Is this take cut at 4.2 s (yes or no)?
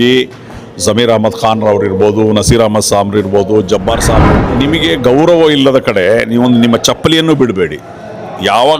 yes